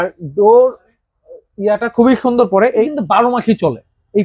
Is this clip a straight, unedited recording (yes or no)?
no